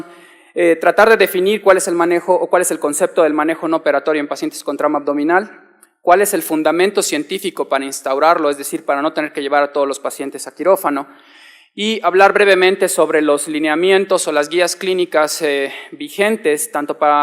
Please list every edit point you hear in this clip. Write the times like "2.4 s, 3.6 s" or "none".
15.6 s